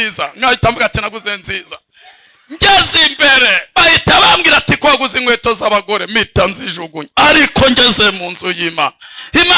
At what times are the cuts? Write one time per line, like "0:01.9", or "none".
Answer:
none